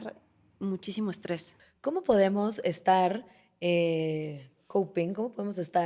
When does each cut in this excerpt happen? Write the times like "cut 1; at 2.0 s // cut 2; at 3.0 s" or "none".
cut 1; at 1.5 s